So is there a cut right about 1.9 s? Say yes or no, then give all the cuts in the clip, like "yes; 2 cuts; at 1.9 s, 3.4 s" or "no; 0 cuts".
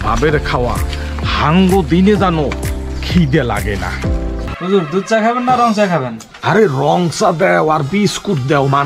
no; 1 cut; at 4.5 s